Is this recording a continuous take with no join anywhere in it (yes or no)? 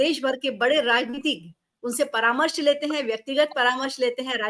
yes